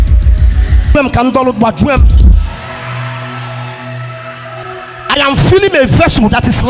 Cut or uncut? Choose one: cut